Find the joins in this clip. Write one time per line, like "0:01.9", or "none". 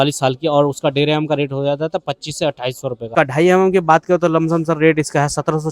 0:03.1